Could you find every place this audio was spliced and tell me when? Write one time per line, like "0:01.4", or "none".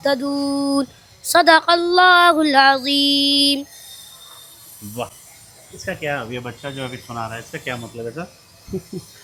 none